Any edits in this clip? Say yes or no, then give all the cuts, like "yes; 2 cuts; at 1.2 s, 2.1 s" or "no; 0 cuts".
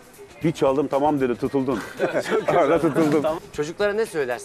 yes; 1 cut; at 3.4 s